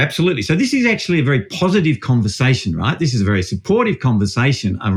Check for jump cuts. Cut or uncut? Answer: uncut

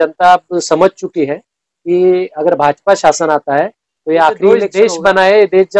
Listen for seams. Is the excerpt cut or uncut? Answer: cut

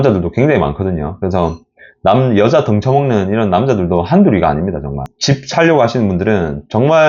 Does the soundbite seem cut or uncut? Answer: uncut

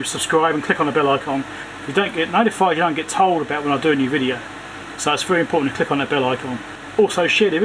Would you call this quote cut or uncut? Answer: cut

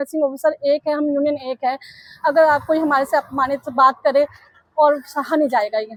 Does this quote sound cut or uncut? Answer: uncut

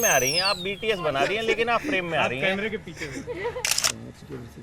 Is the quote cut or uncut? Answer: cut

